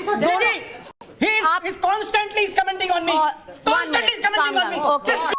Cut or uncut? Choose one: uncut